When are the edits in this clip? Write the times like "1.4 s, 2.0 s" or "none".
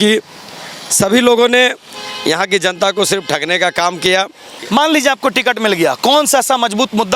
4.5 s

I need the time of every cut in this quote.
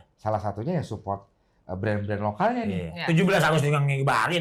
none

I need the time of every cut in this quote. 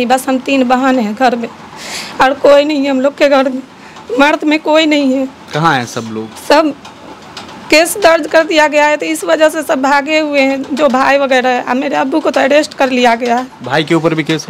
none

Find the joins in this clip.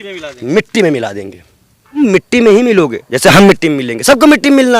2.0 s

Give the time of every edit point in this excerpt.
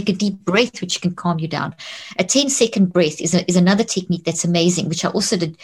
none

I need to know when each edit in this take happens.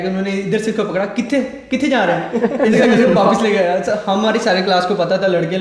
none

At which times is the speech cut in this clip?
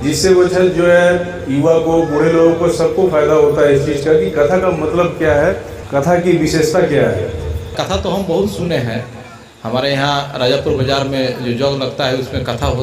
5.7 s, 7.8 s

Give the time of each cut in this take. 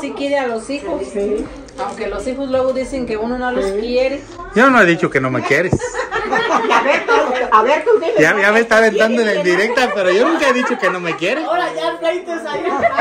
none

